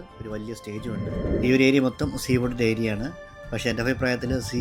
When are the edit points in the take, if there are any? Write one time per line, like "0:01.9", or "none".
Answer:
0:01.0